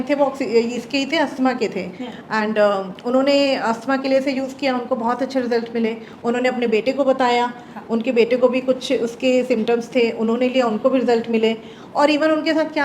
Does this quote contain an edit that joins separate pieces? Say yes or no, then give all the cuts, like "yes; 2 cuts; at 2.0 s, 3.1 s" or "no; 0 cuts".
no; 0 cuts